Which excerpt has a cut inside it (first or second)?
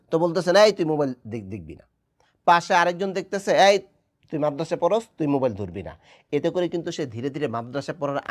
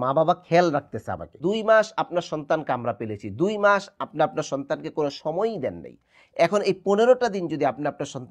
second